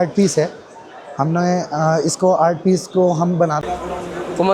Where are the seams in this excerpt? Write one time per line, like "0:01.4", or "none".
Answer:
0:03.6